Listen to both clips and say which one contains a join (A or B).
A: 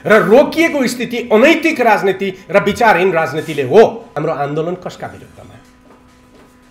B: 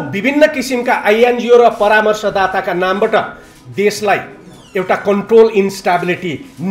A